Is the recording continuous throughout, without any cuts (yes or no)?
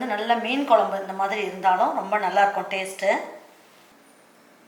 yes